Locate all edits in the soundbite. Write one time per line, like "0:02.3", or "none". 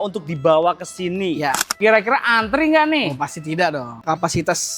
0:01.8
0:04.0